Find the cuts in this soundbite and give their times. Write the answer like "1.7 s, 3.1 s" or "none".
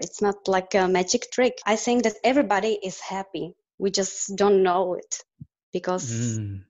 1.6 s